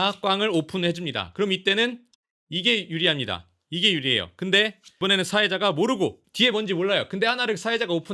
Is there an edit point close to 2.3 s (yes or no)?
no